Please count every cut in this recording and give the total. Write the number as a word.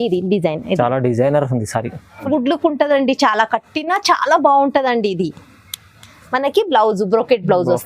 one